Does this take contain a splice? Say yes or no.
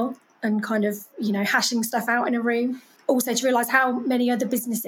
yes